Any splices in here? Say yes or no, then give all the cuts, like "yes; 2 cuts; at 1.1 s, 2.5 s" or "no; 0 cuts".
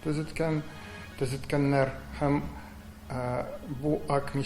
no; 0 cuts